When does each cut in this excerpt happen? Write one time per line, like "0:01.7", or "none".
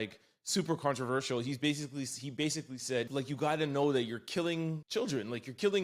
0:03.1
0:04.8